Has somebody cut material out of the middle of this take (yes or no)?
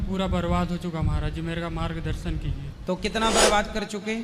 yes